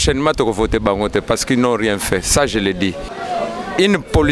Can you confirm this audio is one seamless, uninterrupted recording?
no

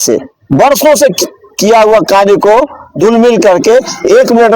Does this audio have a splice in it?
no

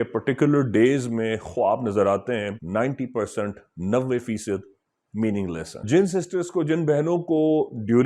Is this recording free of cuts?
no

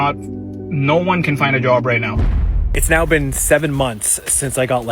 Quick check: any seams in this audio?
yes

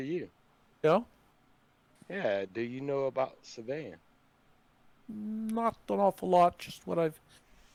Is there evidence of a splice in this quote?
no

